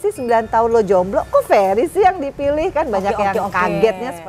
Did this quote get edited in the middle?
no; 0 cuts

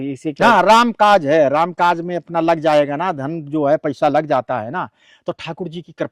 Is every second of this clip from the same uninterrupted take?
yes; 0 cuts

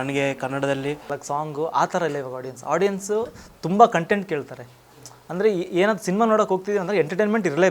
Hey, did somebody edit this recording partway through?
yes; 1 cut; at 1.2 s

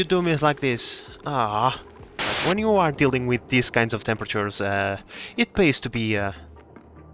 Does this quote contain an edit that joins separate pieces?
yes; 1 cut; at 2.4 s

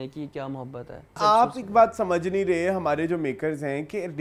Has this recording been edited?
yes; 1 cut; at 1.2 s

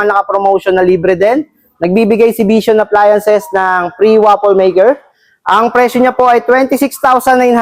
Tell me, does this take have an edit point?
no; 0 cuts

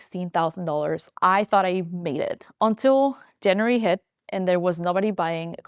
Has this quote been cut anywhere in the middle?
yes; 1 cut; at 1.1 s

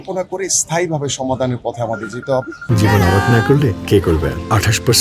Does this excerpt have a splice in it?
yes; 1 cut; at 2.6 s

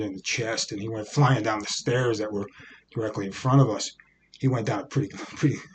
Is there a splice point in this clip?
no; 0 cuts

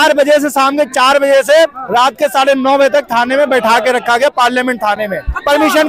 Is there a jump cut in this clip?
no; 0 cuts

